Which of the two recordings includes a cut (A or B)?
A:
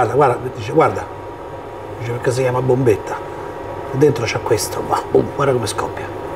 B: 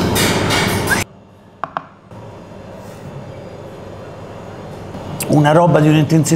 B